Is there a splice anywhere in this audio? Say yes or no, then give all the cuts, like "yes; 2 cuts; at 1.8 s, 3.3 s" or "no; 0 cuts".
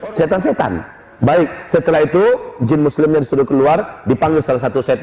no; 0 cuts